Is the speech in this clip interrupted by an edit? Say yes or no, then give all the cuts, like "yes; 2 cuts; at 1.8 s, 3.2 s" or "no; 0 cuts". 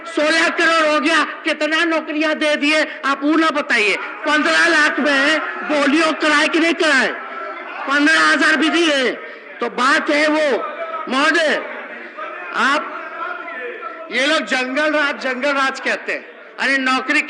no; 0 cuts